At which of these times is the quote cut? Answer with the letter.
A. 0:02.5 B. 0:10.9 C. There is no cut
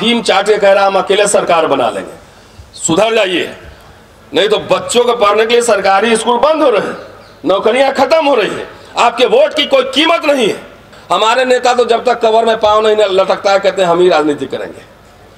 B